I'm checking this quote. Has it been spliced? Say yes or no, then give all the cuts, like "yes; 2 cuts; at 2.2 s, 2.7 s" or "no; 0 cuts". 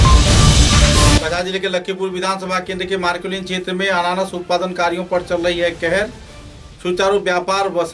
yes; 1 cut; at 1.2 s